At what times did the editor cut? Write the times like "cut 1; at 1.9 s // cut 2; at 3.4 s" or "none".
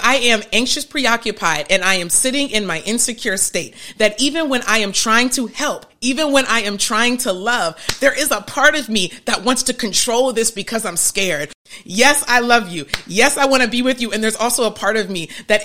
cut 1; at 11.6 s